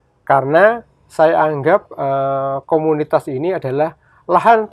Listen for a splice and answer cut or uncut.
uncut